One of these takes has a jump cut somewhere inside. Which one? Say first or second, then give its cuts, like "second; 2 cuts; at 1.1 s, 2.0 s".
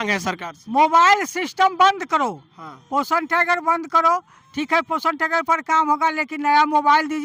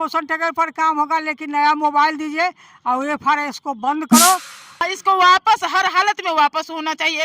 second; 1 cut; at 4.8 s